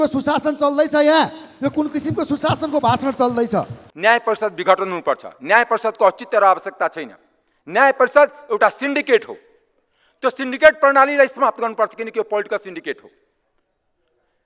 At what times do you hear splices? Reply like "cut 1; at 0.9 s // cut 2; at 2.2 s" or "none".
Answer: cut 1; at 3.8 s